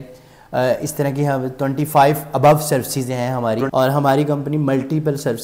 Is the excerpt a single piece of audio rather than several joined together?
no; 1 cut; at 3.7 s

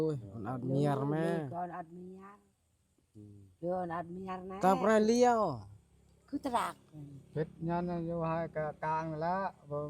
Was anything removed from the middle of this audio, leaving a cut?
no; 0 cuts

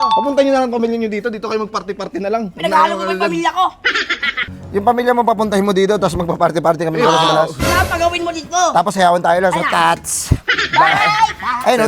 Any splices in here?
yes; 1 cut; at 4.4 s

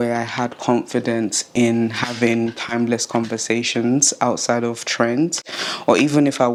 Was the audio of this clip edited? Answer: no; 0 cuts

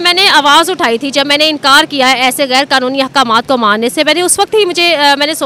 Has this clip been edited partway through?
no; 0 cuts

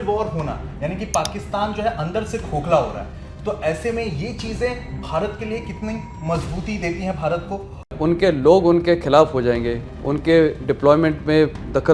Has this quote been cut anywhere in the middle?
yes; 1 cut; at 7.9 s

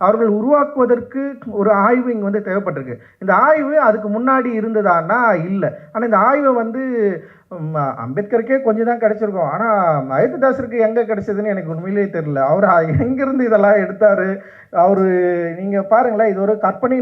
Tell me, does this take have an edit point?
no; 0 cuts

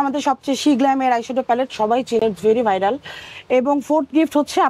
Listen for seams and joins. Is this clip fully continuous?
yes; 0 cuts

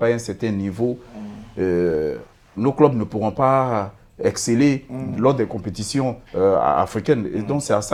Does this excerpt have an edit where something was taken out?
no; 0 cuts

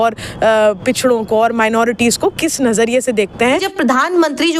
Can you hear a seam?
yes; 1 cut; at 3.6 s

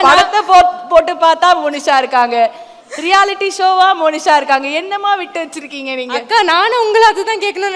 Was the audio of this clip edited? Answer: no; 0 cuts

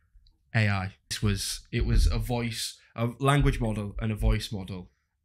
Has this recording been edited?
yes; 1 cut; at 1.2 s

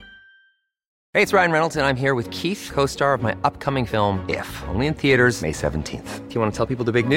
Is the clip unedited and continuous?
no; 1 cut; at 0.9 s

